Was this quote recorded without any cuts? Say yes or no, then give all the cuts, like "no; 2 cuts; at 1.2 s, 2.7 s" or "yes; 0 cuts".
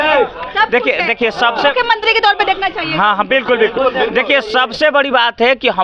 yes; 0 cuts